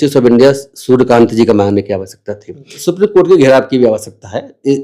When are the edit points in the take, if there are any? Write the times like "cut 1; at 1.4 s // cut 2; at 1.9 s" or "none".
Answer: cut 1; at 2.8 s